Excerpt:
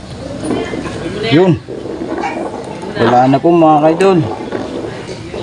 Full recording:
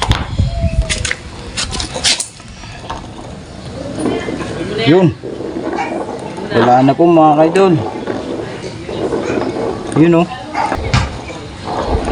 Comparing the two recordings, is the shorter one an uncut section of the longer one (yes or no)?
yes